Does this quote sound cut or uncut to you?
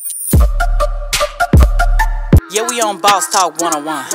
uncut